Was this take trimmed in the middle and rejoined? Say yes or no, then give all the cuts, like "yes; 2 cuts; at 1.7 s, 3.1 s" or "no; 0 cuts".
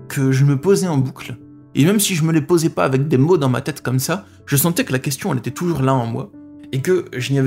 no; 0 cuts